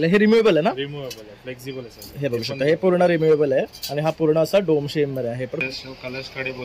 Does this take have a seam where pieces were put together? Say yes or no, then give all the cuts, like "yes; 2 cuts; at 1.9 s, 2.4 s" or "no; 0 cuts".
yes; 1 cut; at 5.6 s